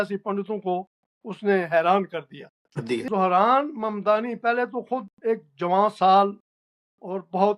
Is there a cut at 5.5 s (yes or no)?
no